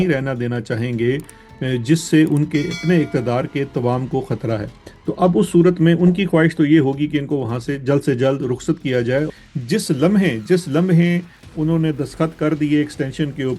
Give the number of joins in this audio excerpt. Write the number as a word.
one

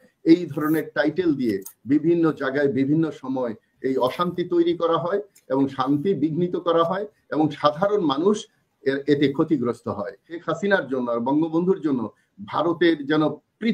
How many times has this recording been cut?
one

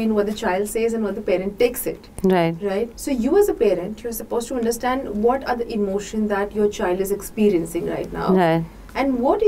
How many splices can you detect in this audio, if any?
one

